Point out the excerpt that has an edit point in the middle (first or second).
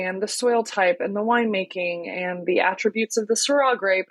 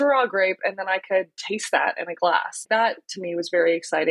second